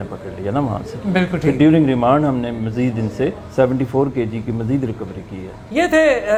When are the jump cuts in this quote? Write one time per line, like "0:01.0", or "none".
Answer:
none